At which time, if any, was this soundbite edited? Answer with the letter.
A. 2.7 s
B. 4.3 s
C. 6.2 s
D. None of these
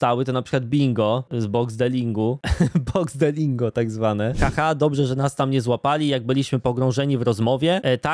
B